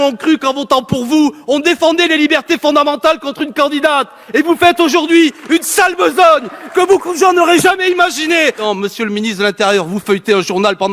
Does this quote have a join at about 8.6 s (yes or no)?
yes